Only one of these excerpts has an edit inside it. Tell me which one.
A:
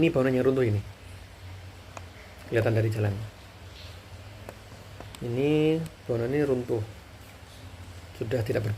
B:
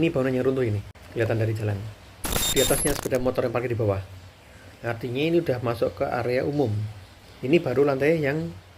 B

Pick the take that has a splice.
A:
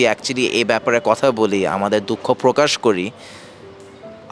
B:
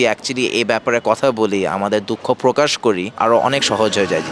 B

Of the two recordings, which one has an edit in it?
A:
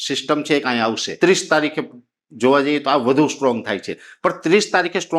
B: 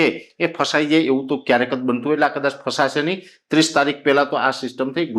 A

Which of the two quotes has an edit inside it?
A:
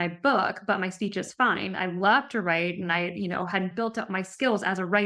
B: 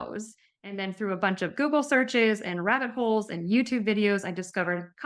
A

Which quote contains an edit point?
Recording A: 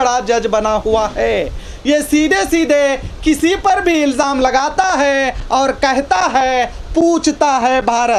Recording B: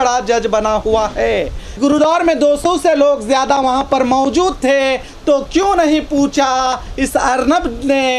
B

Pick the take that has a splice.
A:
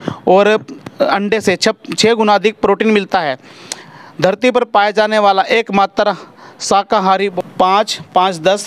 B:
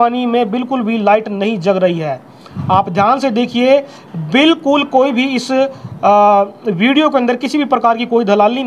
A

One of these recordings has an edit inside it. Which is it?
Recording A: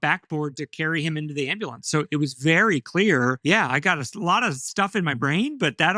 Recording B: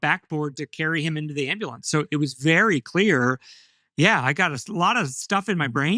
A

